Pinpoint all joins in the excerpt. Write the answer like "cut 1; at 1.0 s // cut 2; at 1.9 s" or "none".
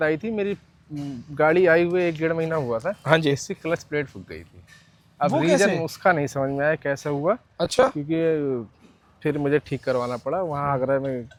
none